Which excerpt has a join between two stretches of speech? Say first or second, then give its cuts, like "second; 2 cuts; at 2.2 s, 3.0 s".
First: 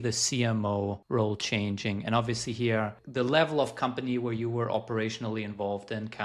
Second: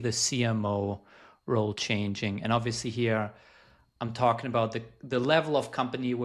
first; 2 cuts; at 1.0 s, 3.0 s